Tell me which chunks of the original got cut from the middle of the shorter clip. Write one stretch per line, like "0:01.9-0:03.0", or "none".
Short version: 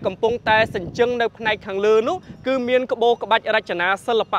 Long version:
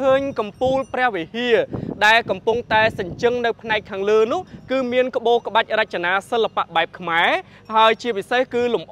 none